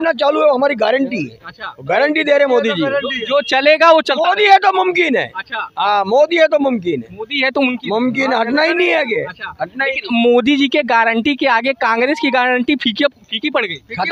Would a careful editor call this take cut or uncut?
uncut